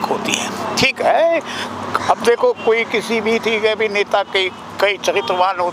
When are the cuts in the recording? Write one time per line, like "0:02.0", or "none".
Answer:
none